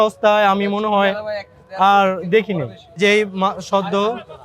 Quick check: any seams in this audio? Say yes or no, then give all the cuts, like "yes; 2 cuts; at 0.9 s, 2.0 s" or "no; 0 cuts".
yes; 1 cut; at 2.8 s